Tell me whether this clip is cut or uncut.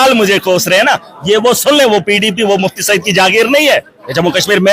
uncut